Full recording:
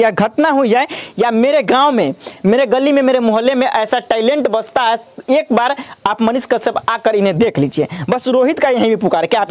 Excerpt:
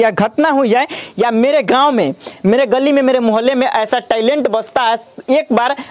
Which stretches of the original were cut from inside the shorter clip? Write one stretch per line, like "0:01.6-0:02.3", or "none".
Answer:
none